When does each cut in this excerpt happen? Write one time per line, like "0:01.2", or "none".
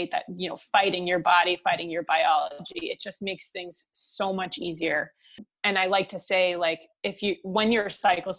0:05.4